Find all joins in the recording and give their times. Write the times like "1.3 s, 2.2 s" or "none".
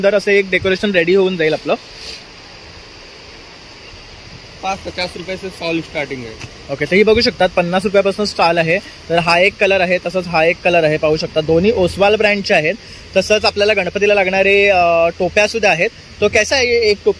none